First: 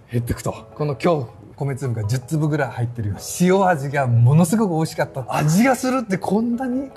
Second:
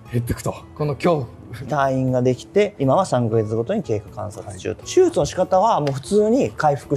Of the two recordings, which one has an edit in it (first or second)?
first